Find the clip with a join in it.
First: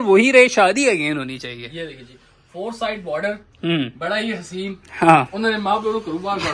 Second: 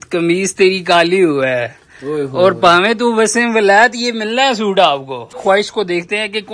second; 1 cut; at 5.4 s

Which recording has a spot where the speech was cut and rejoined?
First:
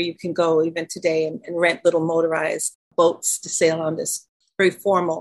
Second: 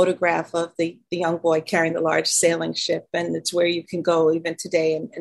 first; 2 cuts; at 2.7 s, 4.2 s

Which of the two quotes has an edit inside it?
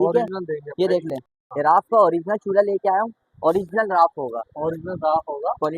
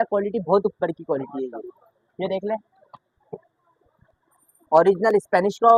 first; 1 cut; at 1.4 s

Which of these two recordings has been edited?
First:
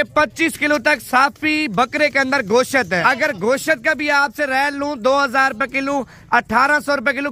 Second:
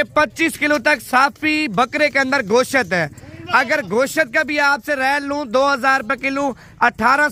first; 1 cut; at 3.0 s

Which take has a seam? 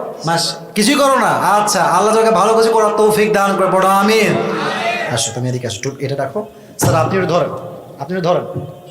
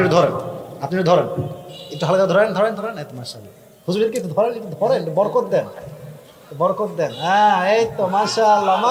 first; 1 cut; at 5.0 s

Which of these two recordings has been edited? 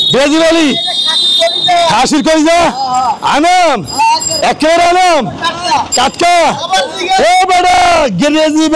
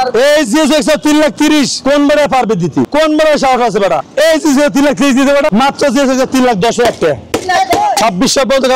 second; 5 cuts; at 1.8 s, 2.9 s, 4.1 s, 5.5 s, 8.0 s

